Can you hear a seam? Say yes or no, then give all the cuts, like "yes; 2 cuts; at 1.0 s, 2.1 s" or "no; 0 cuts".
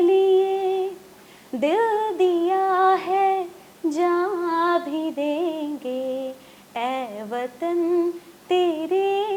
no; 0 cuts